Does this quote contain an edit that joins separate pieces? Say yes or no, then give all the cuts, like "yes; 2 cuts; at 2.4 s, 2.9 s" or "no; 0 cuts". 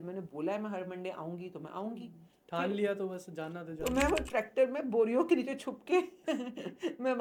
no; 0 cuts